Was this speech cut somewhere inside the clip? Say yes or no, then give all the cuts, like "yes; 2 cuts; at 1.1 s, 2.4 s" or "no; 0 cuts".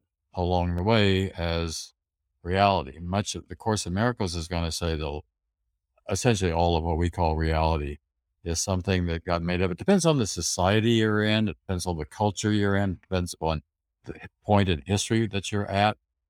no; 0 cuts